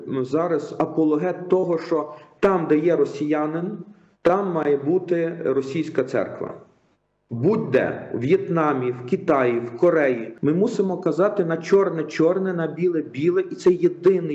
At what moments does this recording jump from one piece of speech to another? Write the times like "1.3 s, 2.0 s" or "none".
10.3 s